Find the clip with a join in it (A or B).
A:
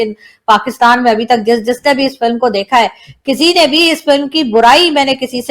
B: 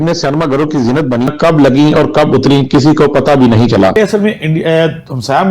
B